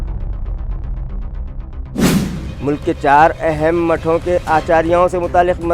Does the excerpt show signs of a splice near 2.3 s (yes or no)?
yes